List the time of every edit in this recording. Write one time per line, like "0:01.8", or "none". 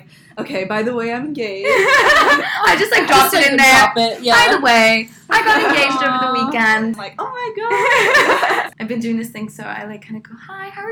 0:07.0
0:08.7